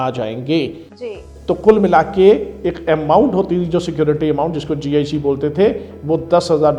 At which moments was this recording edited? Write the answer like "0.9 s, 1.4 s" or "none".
none